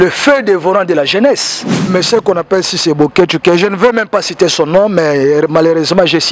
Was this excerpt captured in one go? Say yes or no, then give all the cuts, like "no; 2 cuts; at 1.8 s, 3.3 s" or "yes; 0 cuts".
no; 1 cut; at 1.9 s